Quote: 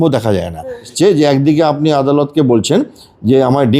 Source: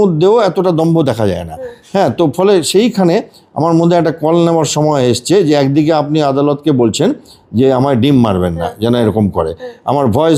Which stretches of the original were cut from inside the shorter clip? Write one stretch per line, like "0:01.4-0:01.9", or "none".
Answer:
0:01.8-0:05.2